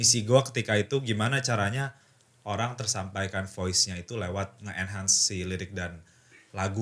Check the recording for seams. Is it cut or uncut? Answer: cut